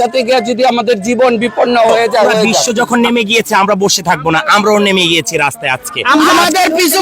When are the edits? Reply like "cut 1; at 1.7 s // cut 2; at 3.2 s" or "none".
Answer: cut 1; at 2.6 s // cut 2; at 6.3 s